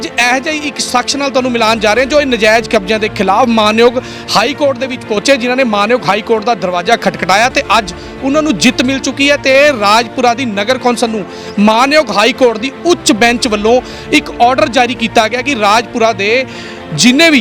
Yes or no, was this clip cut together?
no